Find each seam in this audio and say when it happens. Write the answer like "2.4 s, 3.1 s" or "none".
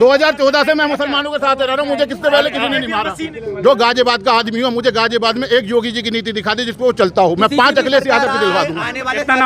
3.4 s